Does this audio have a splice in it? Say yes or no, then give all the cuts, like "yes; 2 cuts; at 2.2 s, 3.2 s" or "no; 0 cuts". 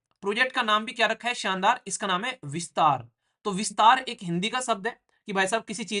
no; 0 cuts